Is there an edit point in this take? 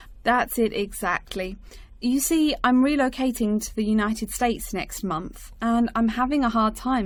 no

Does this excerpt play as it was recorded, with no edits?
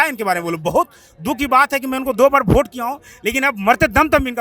yes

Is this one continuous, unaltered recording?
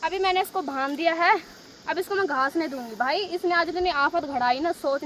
yes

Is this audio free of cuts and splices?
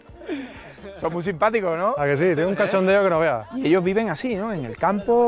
yes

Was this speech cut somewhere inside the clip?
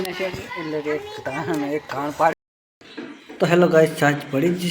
yes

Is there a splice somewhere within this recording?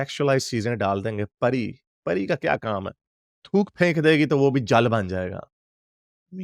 no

